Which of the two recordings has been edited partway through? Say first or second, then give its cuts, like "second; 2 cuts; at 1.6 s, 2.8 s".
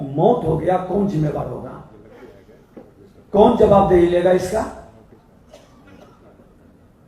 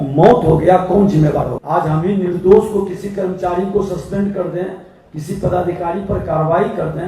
second; 1 cut; at 1.6 s